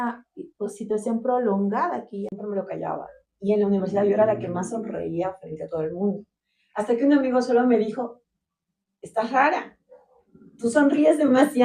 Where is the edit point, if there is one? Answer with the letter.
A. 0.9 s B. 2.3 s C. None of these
B